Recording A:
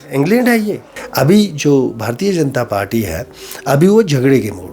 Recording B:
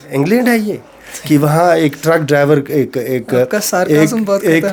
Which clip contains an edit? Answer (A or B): A